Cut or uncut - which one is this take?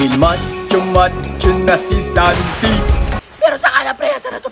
cut